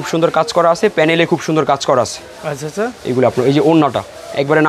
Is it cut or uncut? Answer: uncut